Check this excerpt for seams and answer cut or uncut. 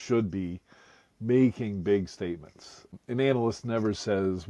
cut